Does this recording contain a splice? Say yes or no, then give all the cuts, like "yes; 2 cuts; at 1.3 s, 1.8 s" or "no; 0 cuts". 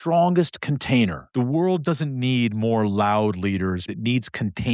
yes; 2 cuts; at 1.2 s, 3.8 s